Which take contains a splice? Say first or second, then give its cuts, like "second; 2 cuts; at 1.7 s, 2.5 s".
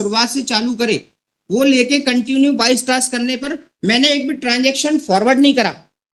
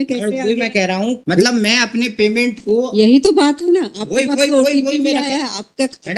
second; 1 cut; at 1.2 s